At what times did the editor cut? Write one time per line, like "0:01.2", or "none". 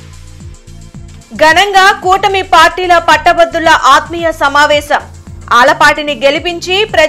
0:01.0

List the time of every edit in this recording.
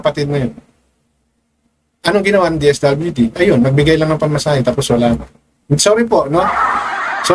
none

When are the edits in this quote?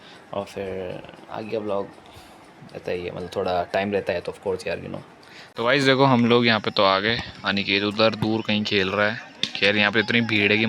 0:05.5

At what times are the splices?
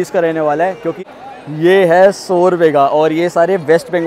0:00.9

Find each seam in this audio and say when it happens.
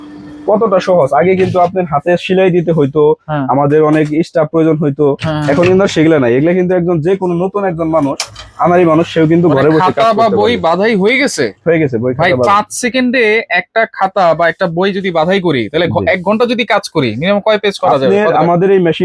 none

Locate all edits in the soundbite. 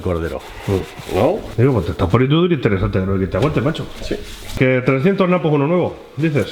0:01.5
0:04.5

